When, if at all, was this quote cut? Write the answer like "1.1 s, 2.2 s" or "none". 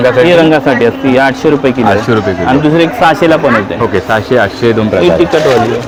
none